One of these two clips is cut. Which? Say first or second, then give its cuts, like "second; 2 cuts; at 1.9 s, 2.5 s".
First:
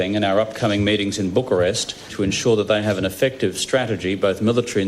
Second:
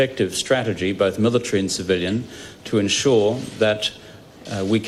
first; 1 cut; at 2.1 s